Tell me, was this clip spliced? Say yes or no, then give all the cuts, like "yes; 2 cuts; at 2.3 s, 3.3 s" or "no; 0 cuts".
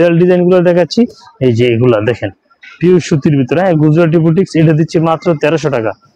no; 0 cuts